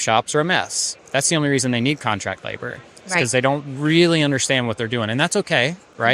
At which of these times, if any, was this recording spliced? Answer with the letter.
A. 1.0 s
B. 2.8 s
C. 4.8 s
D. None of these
A